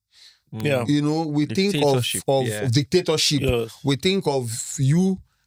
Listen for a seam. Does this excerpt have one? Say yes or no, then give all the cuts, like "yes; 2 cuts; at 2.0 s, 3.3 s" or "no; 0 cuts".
no; 0 cuts